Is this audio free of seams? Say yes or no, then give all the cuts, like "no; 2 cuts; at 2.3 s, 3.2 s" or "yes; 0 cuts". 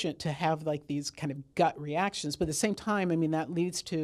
yes; 0 cuts